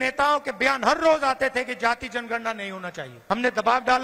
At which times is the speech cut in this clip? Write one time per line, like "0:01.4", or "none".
0:03.1